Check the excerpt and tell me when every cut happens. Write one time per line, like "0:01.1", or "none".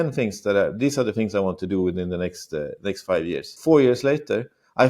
0:03.5